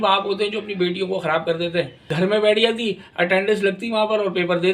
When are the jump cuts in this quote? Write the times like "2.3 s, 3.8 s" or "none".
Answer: 2.0 s

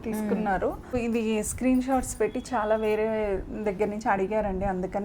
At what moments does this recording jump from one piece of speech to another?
1.0 s

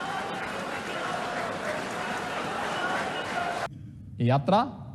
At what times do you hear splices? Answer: 3.7 s

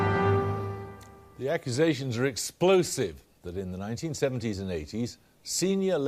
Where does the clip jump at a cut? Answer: none

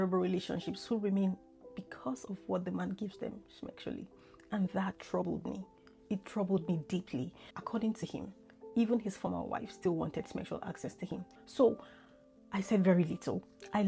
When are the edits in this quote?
7.4 s, 11.3 s

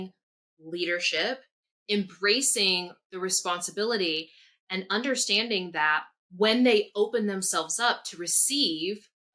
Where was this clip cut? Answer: none

